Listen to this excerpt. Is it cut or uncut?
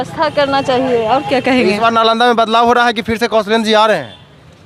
uncut